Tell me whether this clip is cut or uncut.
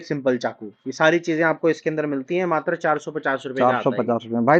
uncut